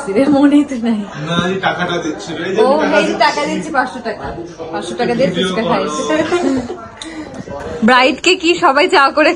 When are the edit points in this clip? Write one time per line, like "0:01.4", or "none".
none